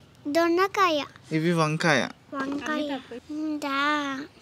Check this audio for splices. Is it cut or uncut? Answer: cut